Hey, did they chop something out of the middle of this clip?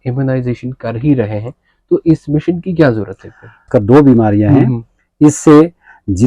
yes; 1 cut; at 3.7 s

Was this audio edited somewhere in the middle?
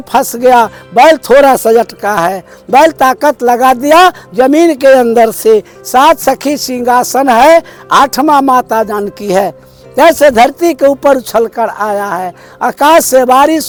no; 0 cuts

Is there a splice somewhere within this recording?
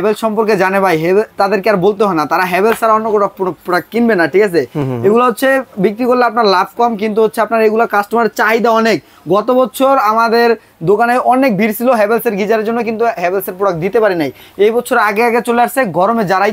no; 0 cuts

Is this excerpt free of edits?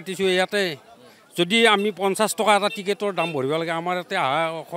yes; 0 cuts

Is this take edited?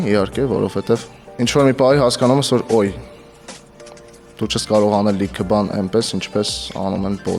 no; 0 cuts

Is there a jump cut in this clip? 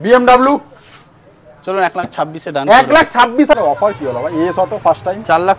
yes; 1 cut; at 3.5 s

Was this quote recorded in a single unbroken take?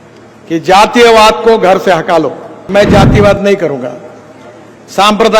no; 1 cut; at 2.5 s

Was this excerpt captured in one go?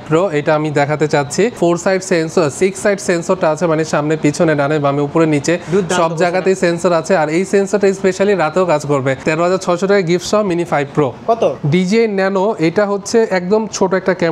no; 3 cuts; at 1.6 s, 9.2 s, 11.6 s

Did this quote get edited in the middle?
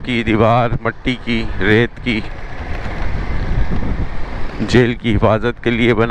no; 0 cuts

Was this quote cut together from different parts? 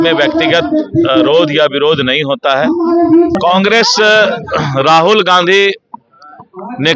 yes; 1 cut; at 3.3 s

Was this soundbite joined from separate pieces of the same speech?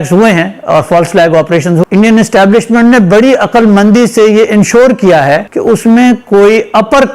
yes; 2 cuts; at 1.8 s, 5.5 s

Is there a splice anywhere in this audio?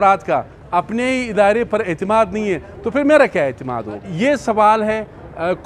yes; 1 cut; at 4.1 s

